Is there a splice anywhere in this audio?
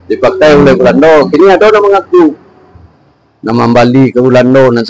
no; 0 cuts

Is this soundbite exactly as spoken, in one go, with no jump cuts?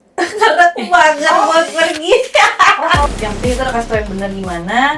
no; 1 cut; at 3.0 s

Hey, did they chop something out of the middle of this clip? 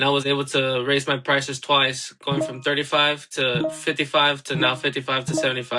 no; 0 cuts

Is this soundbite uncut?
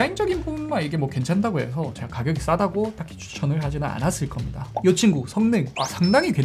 yes; 0 cuts

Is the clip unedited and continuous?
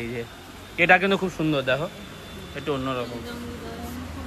yes; 0 cuts

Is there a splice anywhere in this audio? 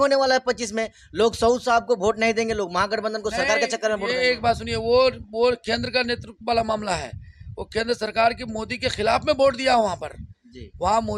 no; 0 cuts

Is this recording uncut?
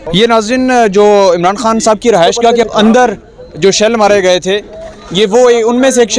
no; 1 cut; at 2.7 s

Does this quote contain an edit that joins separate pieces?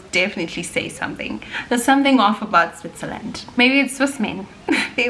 yes; 2 cuts; at 1.5 s, 3.5 s

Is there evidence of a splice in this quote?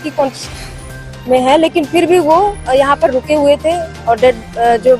no; 0 cuts

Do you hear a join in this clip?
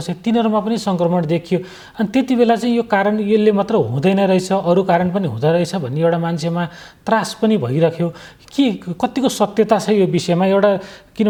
no; 0 cuts

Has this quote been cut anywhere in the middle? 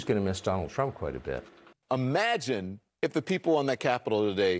yes; 1 cut; at 1.8 s

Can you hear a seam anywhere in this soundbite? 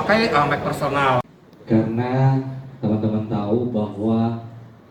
yes; 1 cut; at 1.3 s

